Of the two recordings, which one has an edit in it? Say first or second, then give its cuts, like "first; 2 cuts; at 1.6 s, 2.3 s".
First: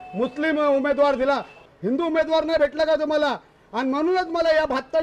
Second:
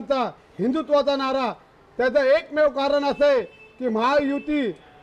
first; 1 cut; at 1.5 s